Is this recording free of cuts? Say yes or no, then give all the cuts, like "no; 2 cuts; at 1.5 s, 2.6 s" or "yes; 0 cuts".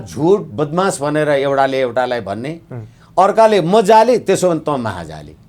yes; 0 cuts